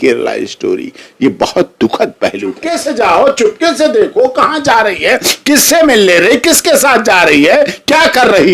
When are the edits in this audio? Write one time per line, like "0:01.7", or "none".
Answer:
0:02.7